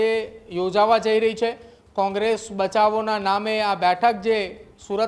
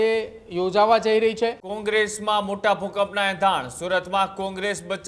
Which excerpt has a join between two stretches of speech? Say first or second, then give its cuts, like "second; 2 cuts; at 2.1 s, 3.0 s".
second; 1 cut; at 1.7 s